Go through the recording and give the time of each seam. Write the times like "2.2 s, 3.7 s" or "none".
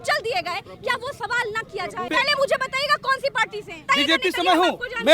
2.1 s, 3.8 s